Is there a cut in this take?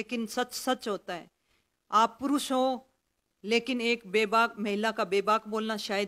no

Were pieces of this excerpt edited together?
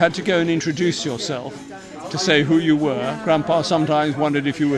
no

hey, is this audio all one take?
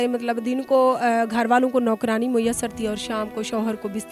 yes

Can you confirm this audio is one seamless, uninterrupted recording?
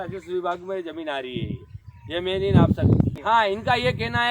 no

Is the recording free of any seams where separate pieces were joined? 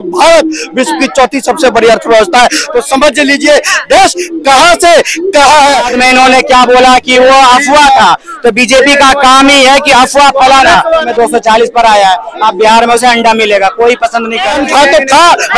no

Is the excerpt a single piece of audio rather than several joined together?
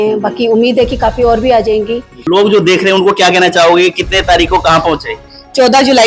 no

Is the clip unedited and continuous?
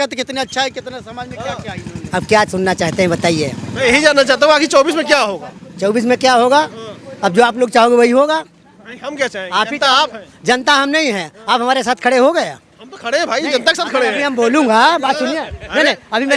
yes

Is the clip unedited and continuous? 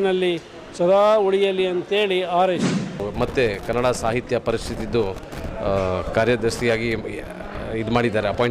no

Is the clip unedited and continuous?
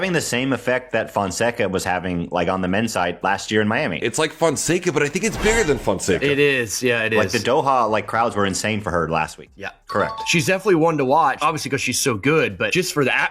no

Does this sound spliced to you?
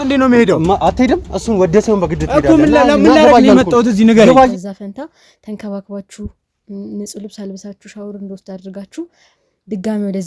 yes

